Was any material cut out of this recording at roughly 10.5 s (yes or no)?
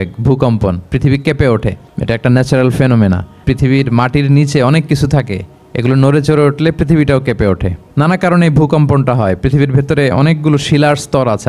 no